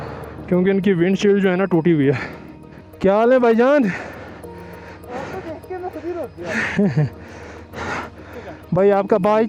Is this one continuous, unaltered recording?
yes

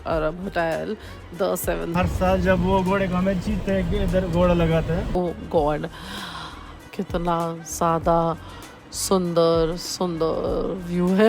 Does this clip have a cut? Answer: yes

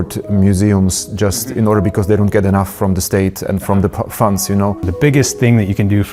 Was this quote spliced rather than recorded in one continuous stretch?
yes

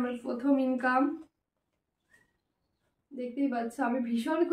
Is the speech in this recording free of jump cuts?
yes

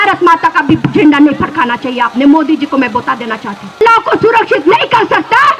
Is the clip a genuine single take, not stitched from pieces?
no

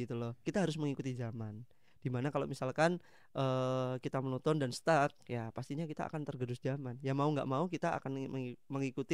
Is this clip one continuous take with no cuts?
yes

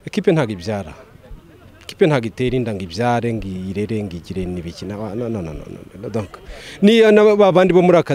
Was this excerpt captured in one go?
yes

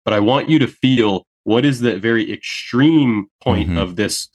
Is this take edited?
yes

